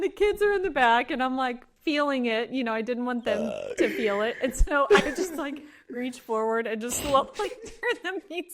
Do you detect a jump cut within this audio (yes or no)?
no